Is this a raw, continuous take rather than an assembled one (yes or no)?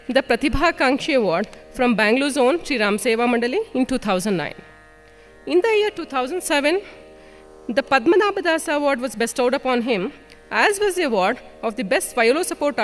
no